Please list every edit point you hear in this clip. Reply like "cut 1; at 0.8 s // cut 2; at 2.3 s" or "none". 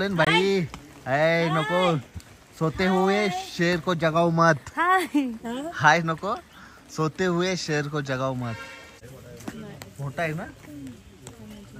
cut 1; at 9.0 s